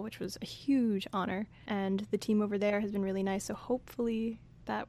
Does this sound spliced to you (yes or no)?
no